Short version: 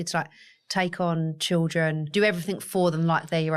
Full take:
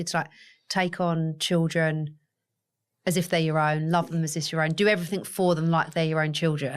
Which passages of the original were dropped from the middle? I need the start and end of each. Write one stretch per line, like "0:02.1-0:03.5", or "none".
0:02.1-0:04.7